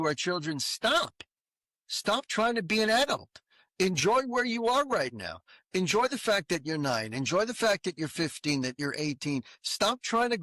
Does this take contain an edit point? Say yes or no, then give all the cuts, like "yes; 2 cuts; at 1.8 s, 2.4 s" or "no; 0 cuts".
no; 0 cuts